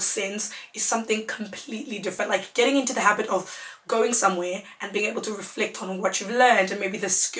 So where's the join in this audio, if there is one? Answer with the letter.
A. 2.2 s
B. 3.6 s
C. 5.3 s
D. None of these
A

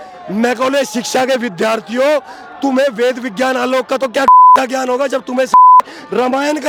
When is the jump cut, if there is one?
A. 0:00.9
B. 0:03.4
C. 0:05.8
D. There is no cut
D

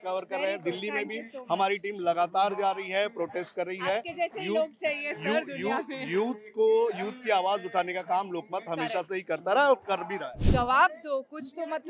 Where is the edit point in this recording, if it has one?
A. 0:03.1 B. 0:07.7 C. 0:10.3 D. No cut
C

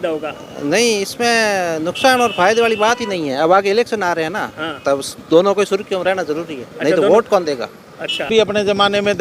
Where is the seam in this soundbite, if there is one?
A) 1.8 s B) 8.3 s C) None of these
B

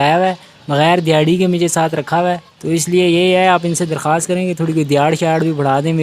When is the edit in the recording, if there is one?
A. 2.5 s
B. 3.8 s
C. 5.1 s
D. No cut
A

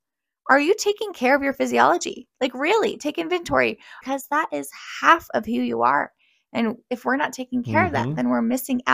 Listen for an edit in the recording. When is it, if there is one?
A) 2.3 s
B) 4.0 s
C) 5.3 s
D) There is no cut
B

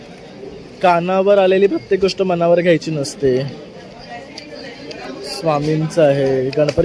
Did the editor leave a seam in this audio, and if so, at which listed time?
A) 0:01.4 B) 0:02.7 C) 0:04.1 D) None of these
D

